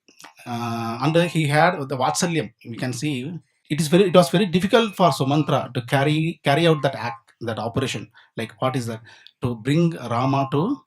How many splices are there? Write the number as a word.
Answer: one